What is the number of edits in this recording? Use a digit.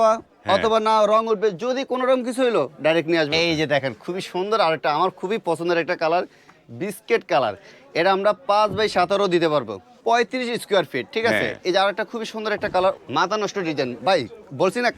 3